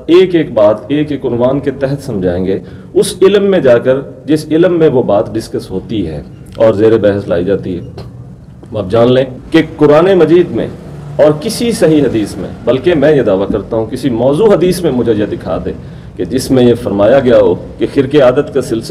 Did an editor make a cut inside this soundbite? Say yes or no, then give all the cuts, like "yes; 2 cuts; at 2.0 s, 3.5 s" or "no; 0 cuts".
no; 0 cuts